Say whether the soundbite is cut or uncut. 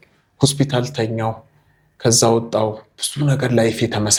uncut